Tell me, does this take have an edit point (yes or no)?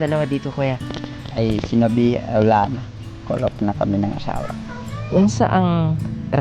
yes